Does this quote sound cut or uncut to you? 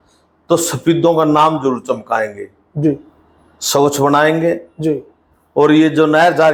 uncut